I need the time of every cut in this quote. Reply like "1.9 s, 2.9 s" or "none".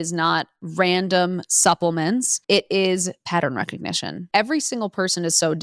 2.3 s, 4.2 s